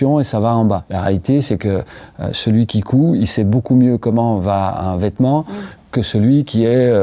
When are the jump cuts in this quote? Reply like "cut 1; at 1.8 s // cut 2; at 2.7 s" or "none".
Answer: none

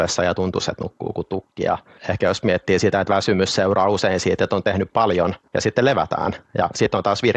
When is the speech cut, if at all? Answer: cut 1; at 1.9 s // cut 2; at 5.4 s

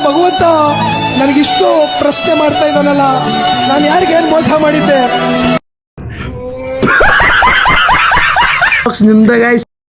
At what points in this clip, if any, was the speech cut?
cut 1; at 8.9 s

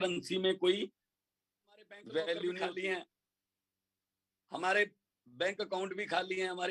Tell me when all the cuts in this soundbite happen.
cut 1; at 2.6 s

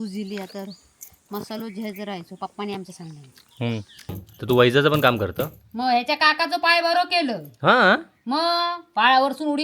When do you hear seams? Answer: cut 1; at 4.3 s

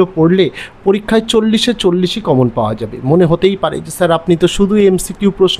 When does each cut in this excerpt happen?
cut 1; at 1.0 s

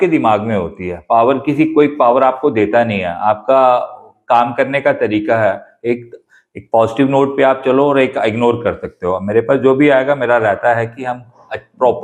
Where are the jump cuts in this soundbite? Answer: none

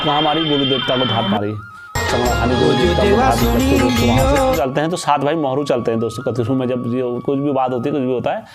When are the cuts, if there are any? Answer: cut 1; at 4.6 s

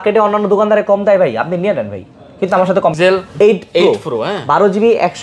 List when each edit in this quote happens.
cut 1; at 2.9 s

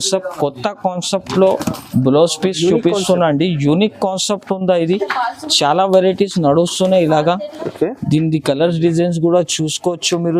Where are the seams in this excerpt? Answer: none

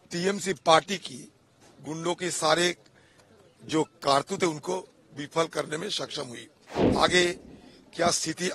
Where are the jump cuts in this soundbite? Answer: cut 1; at 6.8 s

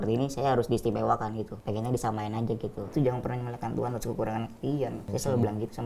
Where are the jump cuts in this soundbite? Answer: cut 1; at 1.6 s // cut 2; at 2.9 s // cut 3; at 5.1 s

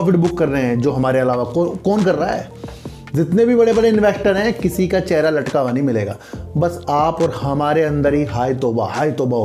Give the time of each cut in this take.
none

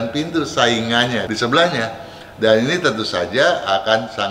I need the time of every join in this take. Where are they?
cut 1; at 1.2 s

